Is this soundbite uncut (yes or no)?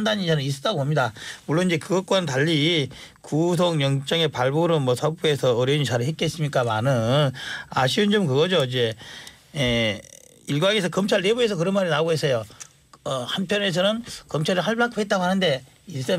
no